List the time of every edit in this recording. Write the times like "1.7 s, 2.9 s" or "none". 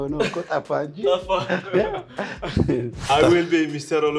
3.0 s